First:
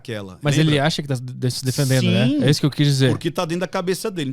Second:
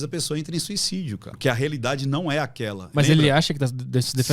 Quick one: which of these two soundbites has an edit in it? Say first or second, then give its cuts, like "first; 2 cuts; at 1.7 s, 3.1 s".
second; 1 cut; at 1.2 s